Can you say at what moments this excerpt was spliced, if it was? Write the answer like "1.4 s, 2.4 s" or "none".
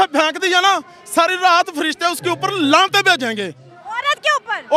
none